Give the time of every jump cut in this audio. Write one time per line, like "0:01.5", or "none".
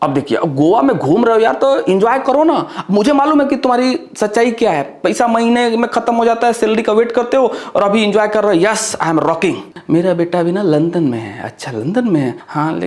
0:09.7